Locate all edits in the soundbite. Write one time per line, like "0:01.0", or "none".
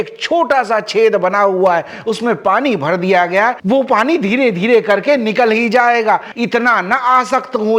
0:06.3